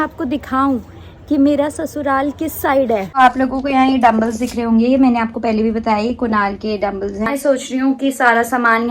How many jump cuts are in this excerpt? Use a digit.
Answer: 1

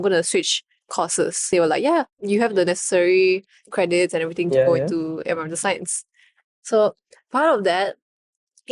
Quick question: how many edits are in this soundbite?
1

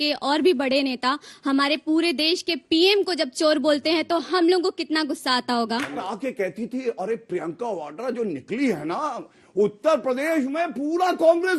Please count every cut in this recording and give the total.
1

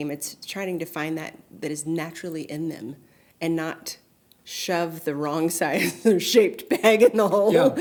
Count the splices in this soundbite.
0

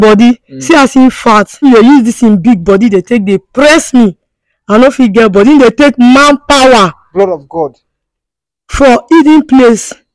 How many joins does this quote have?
1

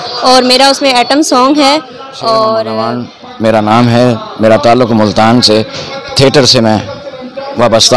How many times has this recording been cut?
1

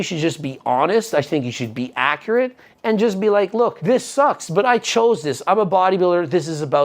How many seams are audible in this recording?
1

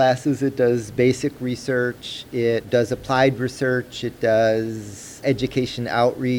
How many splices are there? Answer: 2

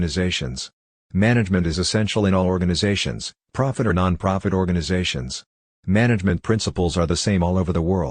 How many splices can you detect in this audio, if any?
1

